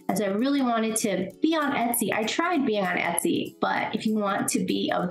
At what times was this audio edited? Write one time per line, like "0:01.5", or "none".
0:03.5